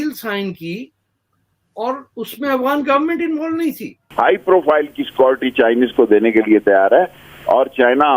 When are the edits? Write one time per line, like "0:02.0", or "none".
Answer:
0:04.0